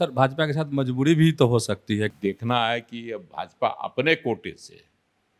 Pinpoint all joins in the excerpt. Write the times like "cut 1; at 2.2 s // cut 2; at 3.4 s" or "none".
cut 1; at 2.1 s